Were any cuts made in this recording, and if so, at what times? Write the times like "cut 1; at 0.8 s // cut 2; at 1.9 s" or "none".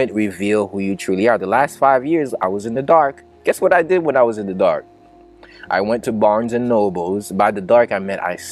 none